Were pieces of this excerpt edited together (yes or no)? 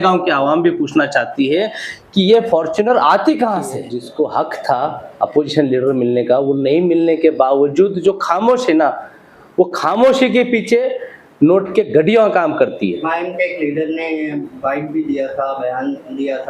yes